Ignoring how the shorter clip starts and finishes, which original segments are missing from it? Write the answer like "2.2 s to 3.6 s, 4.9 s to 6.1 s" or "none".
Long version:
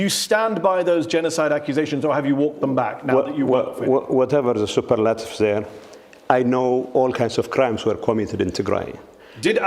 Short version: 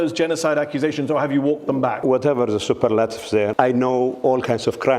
2.9 s to 4.1 s, 5.6 s to 6.2 s